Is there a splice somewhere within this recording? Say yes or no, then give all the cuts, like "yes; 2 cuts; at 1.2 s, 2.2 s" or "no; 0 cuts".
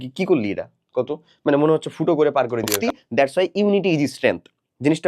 yes; 1 cut; at 2.8 s